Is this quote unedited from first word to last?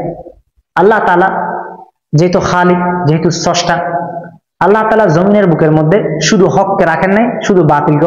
yes; 0 cuts

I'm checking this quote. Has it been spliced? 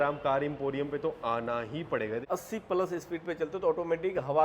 yes; 1 cut; at 2.2 s

